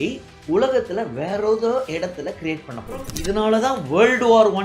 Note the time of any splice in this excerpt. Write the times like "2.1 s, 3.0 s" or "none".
3.1 s